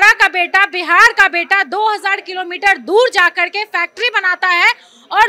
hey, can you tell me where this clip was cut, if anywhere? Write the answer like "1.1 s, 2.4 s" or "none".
none